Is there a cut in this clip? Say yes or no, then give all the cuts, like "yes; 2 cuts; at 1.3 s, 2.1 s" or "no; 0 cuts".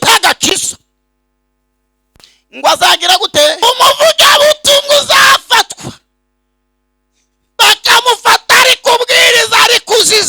yes; 1 cut; at 3.6 s